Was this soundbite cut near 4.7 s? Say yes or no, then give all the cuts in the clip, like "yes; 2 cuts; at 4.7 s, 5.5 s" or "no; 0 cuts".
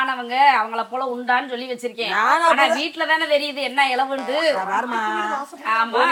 no; 0 cuts